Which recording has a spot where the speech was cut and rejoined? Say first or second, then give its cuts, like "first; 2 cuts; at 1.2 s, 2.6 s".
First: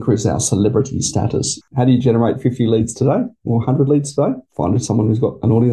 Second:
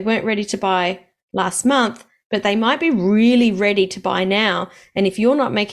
first; 2 cuts; at 1.6 s, 4.5 s